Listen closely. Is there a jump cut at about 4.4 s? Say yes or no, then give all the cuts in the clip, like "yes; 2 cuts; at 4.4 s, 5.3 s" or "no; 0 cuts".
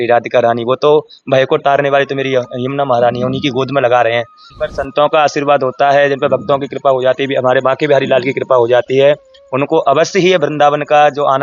yes; 1 cut; at 4.4 s